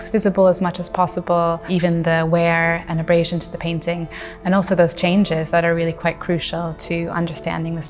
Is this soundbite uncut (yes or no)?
yes